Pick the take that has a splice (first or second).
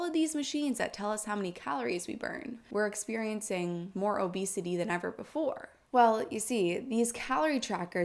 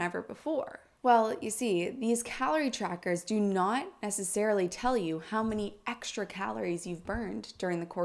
first